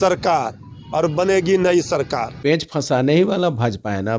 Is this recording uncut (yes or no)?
no